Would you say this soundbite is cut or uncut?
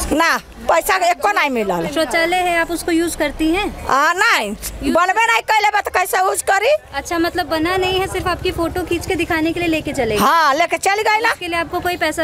uncut